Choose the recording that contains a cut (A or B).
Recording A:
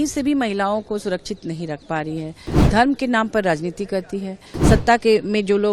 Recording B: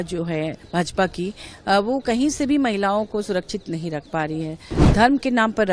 A